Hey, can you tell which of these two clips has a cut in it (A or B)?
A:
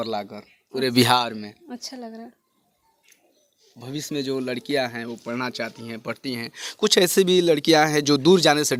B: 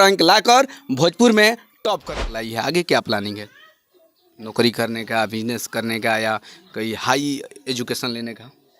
B